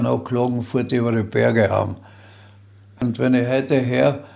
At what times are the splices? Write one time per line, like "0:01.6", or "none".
0:02.9